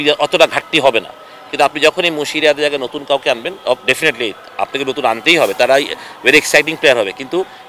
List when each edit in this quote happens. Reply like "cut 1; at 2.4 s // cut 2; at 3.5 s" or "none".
none

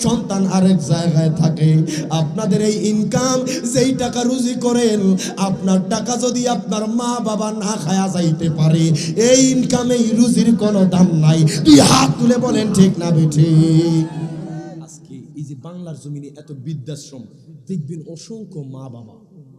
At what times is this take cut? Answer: cut 1; at 14.9 s

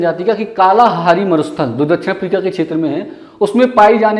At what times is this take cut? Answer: none

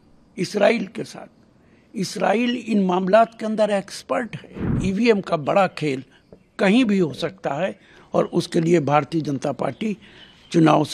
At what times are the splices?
cut 1; at 4.8 s

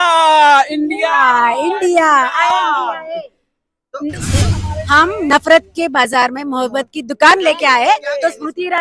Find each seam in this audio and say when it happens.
cut 1; at 4.5 s

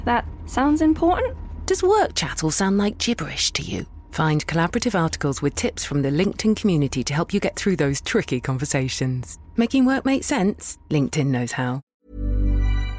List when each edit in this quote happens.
cut 1; at 11.9 s

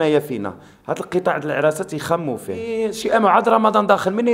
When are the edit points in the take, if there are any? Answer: cut 1; at 2.7 s

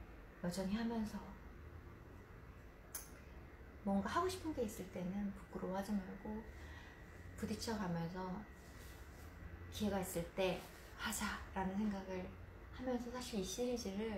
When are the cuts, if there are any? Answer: none

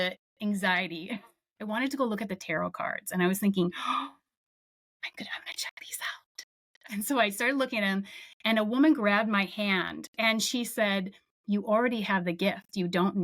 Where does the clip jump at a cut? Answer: cut 1; at 1.5 s

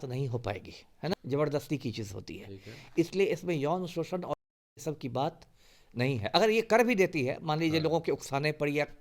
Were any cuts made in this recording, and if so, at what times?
cut 1; at 1.1 s

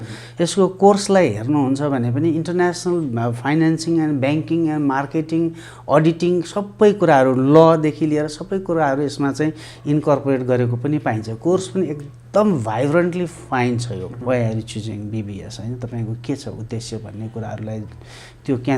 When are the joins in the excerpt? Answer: cut 1; at 14.1 s

